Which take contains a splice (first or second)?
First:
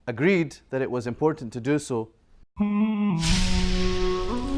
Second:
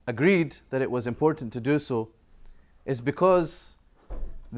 second